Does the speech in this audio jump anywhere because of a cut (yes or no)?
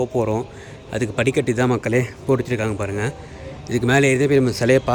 no